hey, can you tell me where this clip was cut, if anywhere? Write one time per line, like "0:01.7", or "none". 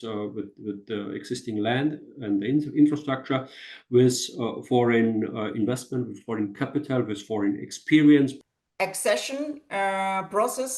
0:08.4